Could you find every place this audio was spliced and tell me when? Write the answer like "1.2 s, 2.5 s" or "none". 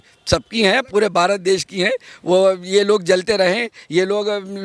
none